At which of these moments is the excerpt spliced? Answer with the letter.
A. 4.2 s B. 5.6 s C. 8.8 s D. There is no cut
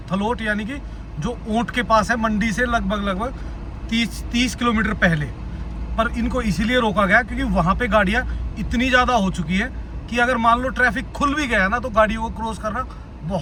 D